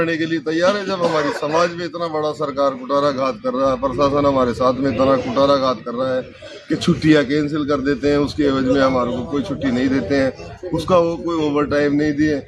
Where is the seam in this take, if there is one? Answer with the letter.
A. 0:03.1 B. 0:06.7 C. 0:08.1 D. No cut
D